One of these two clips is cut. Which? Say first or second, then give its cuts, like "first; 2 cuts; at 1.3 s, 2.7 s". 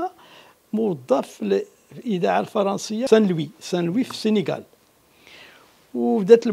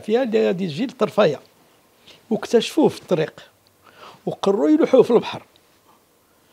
first; 1 cut; at 3.1 s